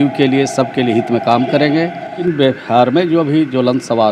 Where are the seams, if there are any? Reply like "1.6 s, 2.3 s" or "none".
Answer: 2.2 s